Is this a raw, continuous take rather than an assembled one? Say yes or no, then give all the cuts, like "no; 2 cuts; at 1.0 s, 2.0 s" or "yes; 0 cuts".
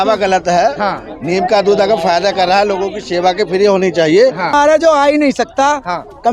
no; 1 cut; at 4.5 s